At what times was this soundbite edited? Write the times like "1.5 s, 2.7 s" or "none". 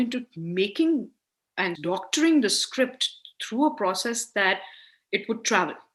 none